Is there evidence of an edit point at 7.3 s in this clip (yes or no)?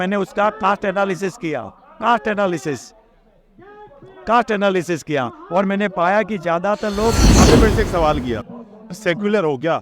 yes